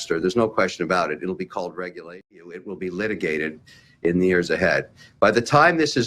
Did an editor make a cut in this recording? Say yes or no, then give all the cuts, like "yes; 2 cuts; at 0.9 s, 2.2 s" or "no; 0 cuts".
yes; 1 cut; at 2.5 s